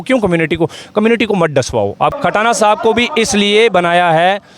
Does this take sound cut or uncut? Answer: cut